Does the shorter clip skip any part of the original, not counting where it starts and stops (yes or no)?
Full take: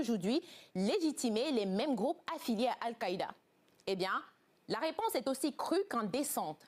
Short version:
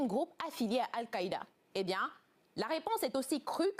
yes